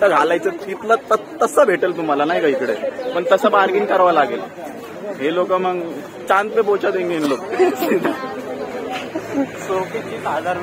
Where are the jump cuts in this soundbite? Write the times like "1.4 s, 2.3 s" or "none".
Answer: none